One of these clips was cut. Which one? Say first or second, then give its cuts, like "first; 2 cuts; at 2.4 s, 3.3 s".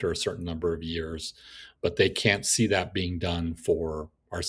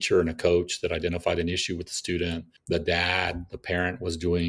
second; 1 cut; at 2.5 s